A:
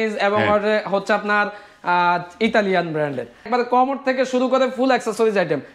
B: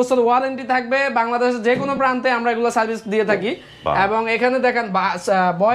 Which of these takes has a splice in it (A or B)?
A